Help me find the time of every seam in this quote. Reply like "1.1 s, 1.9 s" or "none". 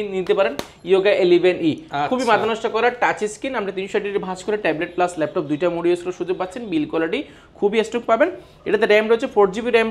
none